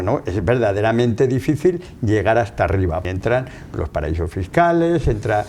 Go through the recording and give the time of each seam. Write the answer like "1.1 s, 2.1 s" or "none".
3.0 s